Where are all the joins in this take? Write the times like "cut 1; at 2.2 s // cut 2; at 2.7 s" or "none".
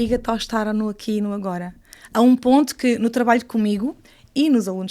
none